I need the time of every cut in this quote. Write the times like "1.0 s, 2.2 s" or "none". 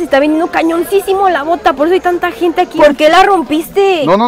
2.7 s